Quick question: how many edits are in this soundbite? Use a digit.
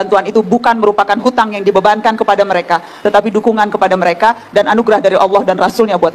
0